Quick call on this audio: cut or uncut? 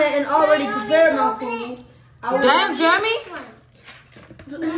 uncut